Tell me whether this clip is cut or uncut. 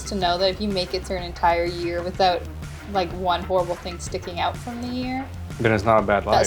uncut